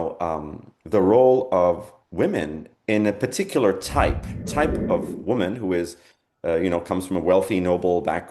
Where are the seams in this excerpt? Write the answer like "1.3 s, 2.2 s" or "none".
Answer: 4.3 s